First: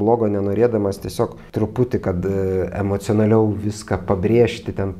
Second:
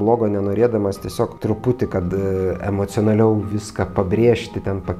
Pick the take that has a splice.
second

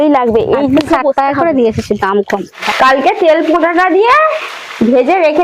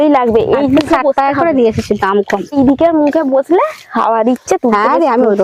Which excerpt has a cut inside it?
first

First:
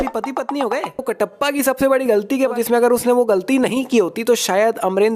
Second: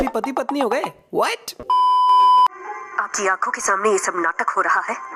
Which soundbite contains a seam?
first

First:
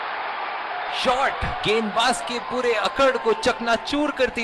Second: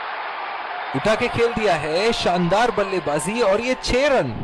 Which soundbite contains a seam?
first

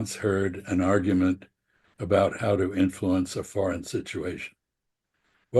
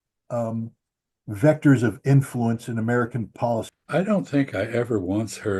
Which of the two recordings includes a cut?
second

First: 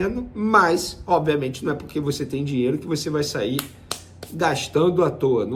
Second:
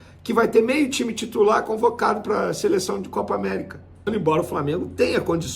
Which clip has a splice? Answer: second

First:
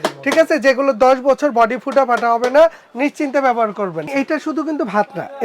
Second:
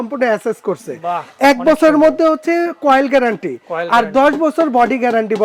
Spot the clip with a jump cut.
first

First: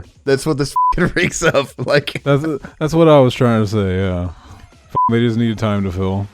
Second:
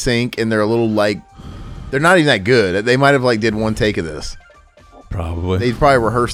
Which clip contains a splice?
first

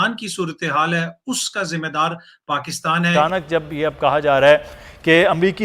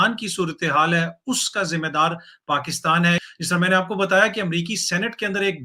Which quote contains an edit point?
first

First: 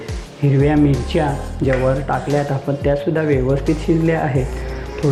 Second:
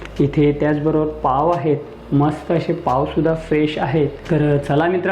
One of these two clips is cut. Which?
second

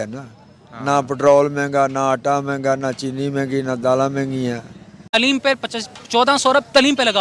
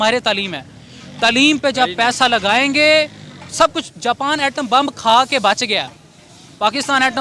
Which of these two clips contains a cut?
first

